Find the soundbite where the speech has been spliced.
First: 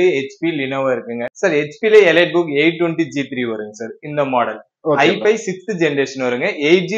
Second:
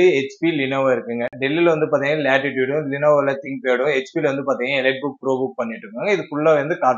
first; 1 cut; at 1.3 s

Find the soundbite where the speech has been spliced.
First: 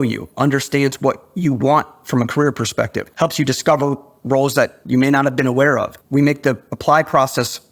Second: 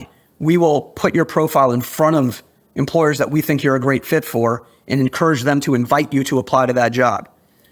first; 3 cuts; at 3.0 s, 4.8 s, 6.0 s

